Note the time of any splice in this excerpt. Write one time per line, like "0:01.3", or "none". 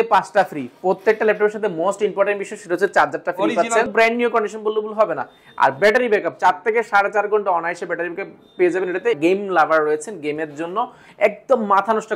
0:03.9
0:09.2